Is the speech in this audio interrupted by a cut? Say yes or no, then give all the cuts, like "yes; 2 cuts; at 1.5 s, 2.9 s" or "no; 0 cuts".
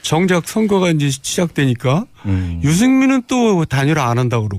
yes; 1 cut; at 2.8 s